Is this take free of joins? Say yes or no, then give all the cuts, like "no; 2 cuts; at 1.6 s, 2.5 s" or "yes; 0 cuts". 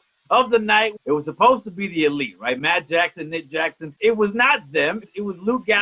no; 3 cuts; at 0.9 s, 3.9 s, 5.0 s